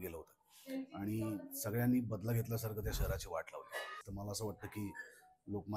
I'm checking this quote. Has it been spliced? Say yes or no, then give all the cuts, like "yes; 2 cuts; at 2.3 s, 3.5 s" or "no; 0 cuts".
yes; 1 cut; at 4.0 s